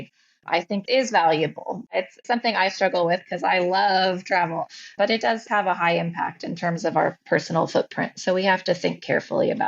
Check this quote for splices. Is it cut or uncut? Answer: cut